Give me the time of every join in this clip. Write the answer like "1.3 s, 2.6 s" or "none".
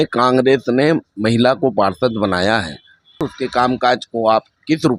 3.2 s